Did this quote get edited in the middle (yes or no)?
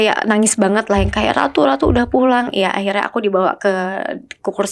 no